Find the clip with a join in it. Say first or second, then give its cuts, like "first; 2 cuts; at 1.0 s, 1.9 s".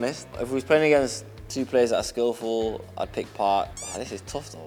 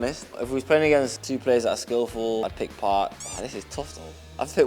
second; 2 cuts; at 1.2 s, 2.4 s